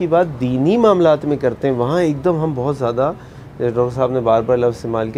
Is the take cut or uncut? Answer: uncut